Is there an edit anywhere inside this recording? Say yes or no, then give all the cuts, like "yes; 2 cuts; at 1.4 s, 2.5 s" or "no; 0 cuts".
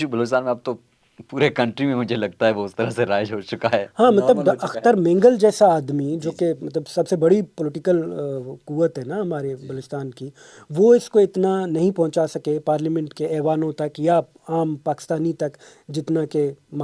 no; 0 cuts